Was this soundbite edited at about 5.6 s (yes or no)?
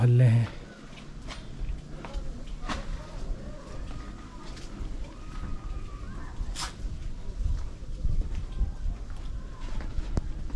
no